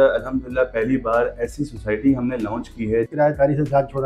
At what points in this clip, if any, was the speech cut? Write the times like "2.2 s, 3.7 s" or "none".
3.1 s